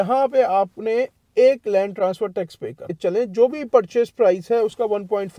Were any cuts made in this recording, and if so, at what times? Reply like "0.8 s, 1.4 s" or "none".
2.9 s